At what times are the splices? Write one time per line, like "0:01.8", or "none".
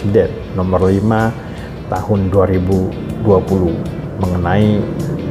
none